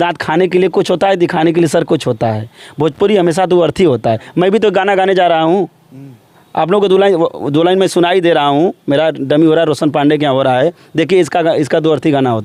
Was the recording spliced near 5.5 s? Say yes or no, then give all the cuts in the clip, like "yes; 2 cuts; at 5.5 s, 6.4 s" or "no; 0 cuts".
no; 0 cuts